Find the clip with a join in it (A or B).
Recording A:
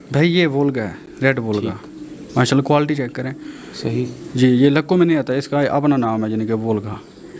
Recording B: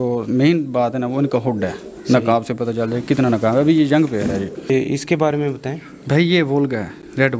B